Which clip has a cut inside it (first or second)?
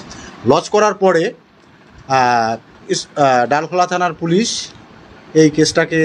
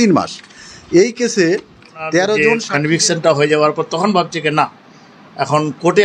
second